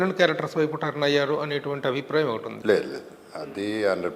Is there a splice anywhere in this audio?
yes; 1 cut; at 2.5 s

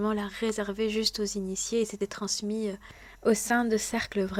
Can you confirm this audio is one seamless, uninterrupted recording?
yes; 0 cuts

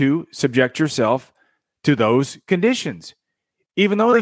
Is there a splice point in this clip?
no; 0 cuts

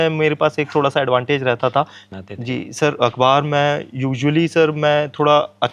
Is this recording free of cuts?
no; 1 cut; at 2.0 s

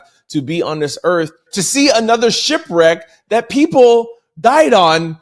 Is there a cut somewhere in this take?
yes; 2 cuts; at 1.5 s, 3.1 s

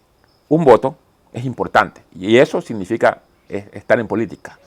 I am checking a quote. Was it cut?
no; 0 cuts

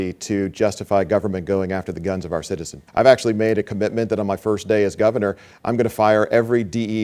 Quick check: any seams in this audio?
yes; 1 cut; at 2.8 s

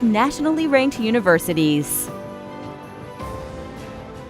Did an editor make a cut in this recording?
yes; 1 cut; at 1.9 s

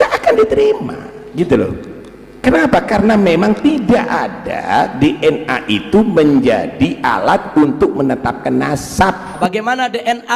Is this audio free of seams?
no; 1 cut; at 9.4 s

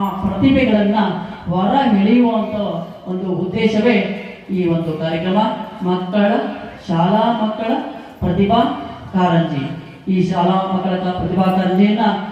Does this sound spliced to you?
no; 0 cuts

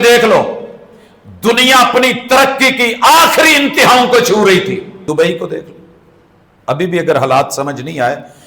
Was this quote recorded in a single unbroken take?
no; 1 cut; at 4.9 s

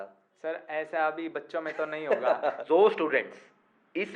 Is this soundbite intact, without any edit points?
no; 1 cut; at 2.6 s

